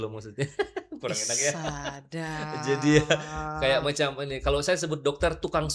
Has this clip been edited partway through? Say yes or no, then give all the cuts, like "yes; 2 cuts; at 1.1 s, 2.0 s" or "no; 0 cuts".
no; 0 cuts